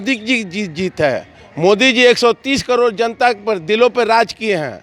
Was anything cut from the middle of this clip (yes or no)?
no